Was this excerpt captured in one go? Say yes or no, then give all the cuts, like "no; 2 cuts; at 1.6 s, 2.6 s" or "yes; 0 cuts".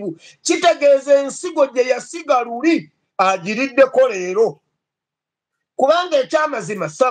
yes; 0 cuts